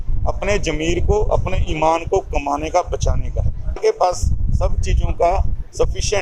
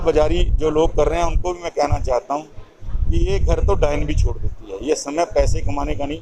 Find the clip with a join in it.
first; 1 cut; at 3.8 s

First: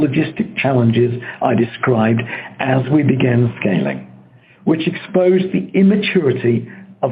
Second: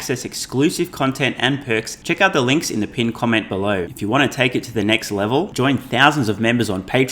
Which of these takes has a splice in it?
second; 2 cuts; at 1.9 s, 3.9 s

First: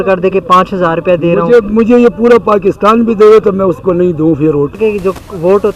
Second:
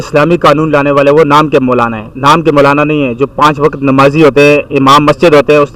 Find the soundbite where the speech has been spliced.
first; 1 cut; at 4.8 s

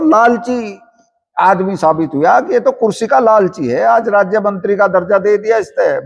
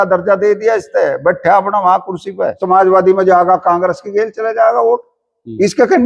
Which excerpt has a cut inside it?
second; 1 cut; at 2.6 s

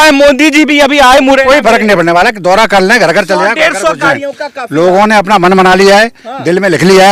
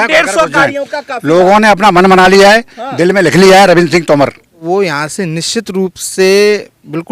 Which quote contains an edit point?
second; 1 cut; at 4.6 s

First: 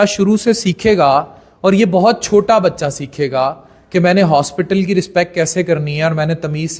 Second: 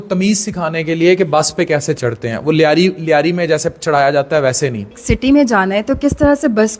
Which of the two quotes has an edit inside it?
second; 1 cut; at 4.9 s

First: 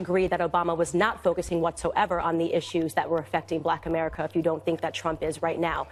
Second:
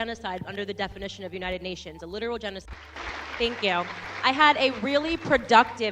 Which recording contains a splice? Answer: second; 1 cut; at 2.7 s

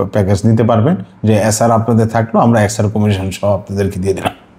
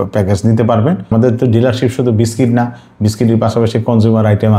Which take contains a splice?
second; 1 cut; at 1.1 s

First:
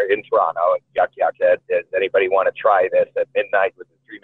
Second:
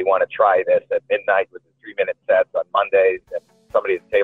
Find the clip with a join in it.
first; 1 cut; at 1.3 s

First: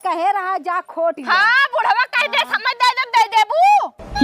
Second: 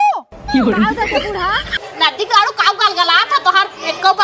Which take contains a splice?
second; 1 cut; at 1.8 s

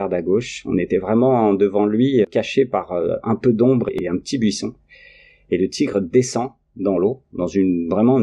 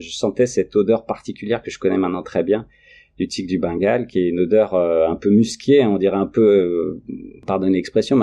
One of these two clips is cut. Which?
first; 1 cut; at 2.3 s

